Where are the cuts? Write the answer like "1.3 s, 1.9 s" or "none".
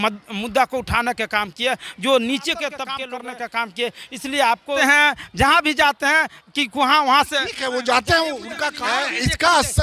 3.0 s, 4.8 s, 8.7 s